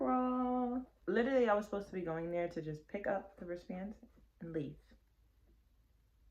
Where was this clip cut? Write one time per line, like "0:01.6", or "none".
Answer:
0:00.9